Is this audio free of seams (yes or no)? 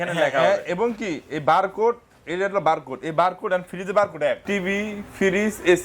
no